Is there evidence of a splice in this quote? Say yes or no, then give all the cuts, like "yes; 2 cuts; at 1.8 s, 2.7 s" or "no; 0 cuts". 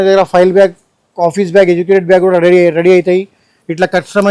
no; 0 cuts